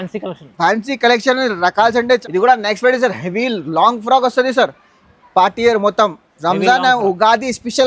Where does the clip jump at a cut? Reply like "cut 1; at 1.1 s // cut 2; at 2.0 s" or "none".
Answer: cut 1; at 2.2 s